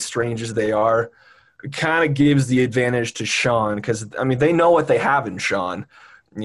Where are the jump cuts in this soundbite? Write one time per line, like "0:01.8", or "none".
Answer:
none